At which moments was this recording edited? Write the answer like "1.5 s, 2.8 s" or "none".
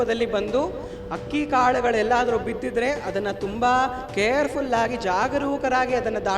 none